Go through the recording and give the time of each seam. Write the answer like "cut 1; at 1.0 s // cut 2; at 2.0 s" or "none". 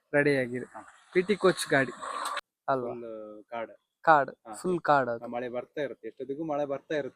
cut 1; at 2.5 s